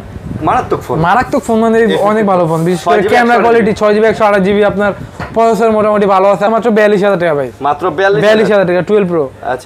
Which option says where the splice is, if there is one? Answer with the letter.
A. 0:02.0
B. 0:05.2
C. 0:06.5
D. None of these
C